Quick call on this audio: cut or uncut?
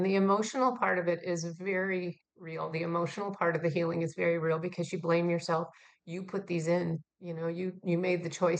uncut